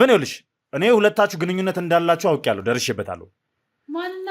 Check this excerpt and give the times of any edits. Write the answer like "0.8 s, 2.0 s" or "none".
none

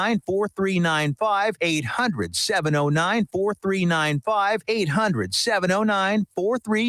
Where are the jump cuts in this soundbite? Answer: 1.6 s, 4.6 s

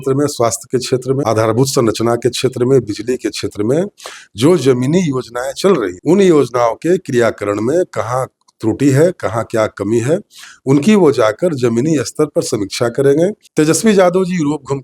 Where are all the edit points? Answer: 1.2 s, 5.9 s, 13.4 s

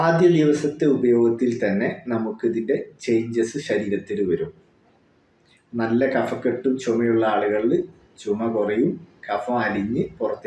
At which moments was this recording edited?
none

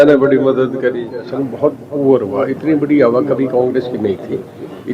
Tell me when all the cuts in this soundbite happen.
1.1 s

